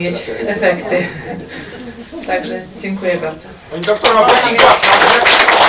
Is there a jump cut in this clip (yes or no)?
no